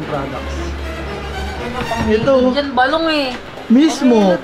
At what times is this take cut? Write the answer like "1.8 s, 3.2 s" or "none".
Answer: none